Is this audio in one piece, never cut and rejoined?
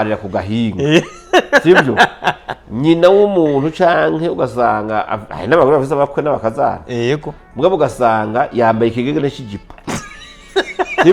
yes; 0 cuts

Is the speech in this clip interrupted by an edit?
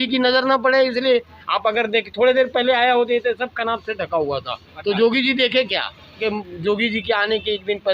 yes; 1 cut; at 6.2 s

